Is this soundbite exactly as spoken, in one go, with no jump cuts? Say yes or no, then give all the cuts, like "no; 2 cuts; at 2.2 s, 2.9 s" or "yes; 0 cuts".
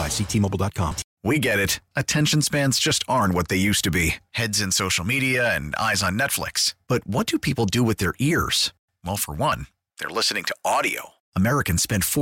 no; 1 cut; at 1.1 s